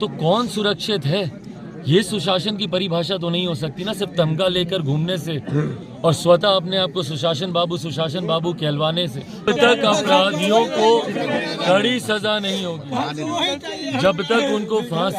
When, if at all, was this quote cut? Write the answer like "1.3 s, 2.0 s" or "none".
9.4 s